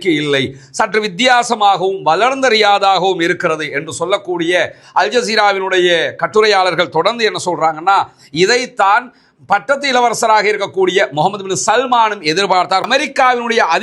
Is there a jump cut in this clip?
yes; 1 cut; at 12.9 s

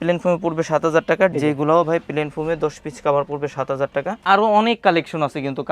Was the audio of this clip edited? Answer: yes; 2 cuts; at 1.3 s, 4.2 s

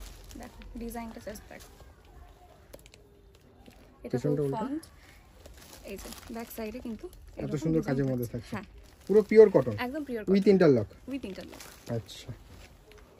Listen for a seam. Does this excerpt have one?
no; 0 cuts

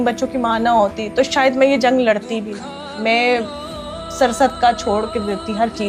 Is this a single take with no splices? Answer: yes; 0 cuts

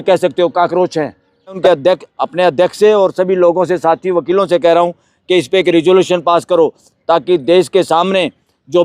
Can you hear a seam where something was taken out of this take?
yes; 1 cut; at 1.6 s

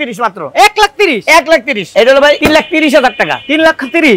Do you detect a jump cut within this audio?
yes; 2 cuts; at 1.8 s, 2.4 s

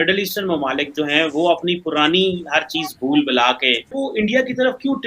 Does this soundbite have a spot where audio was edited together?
yes; 1 cut; at 3.9 s

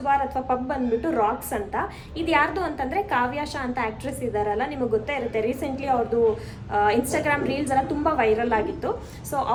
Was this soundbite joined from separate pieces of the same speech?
no; 0 cuts

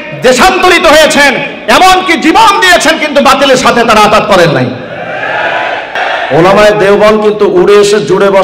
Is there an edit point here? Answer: yes; 1 cut; at 6.0 s

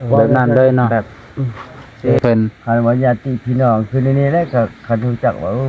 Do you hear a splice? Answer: yes; 1 cut; at 2.2 s

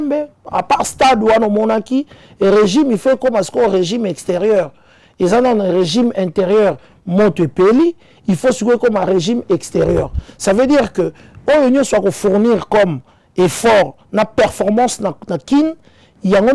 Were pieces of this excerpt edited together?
no; 0 cuts

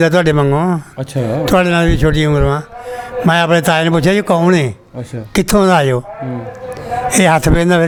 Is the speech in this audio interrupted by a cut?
no; 0 cuts

